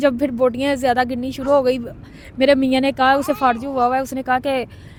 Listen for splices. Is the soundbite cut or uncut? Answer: uncut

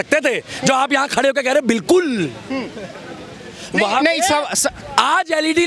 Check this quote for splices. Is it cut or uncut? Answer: uncut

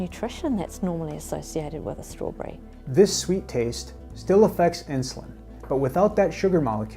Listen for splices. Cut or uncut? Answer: uncut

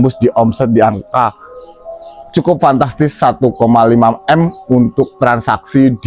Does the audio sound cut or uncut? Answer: uncut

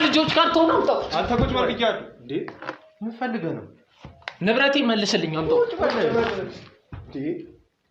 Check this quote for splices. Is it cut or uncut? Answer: uncut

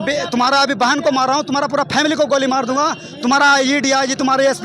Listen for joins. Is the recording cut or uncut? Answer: uncut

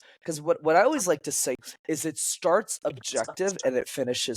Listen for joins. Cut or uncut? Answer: cut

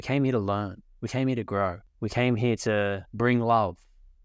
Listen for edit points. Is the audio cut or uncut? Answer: cut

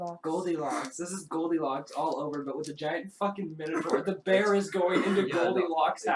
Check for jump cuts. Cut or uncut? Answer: uncut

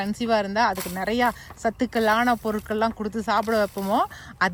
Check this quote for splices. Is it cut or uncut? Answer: uncut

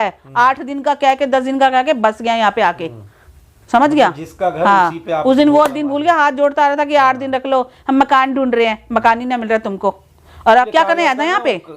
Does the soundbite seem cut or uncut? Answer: cut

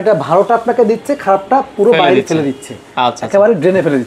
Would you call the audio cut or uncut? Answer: uncut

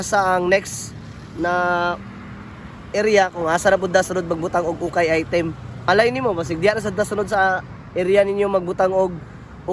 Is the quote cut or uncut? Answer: cut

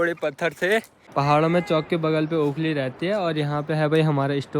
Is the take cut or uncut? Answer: cut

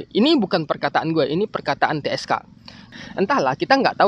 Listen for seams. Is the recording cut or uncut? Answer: cut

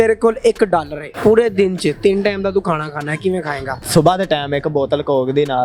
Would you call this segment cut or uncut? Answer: cut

